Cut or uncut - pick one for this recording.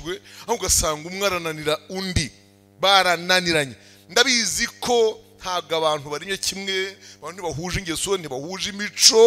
uncut